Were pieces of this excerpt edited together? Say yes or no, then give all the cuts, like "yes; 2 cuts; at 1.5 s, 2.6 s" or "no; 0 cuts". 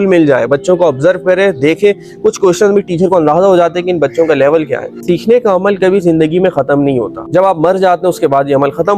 yes; 2 cuts; at 5.0 s, 7.2 s